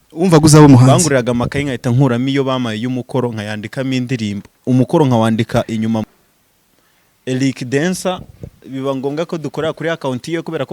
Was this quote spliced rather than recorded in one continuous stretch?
yes; 1 cut; at 6.0 s

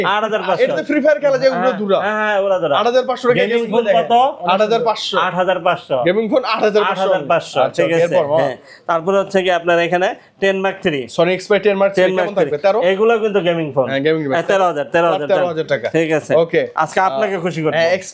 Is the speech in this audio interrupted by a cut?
no; 0 cuts

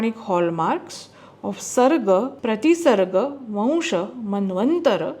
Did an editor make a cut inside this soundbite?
yes; 1 cut; at 2.4 s

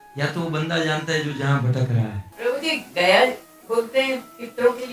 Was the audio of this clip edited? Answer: yes; 1 cut; at 2.2 s

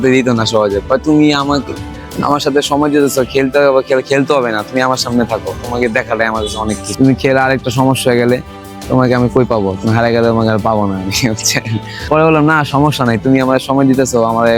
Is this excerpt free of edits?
yes; 0 cuts

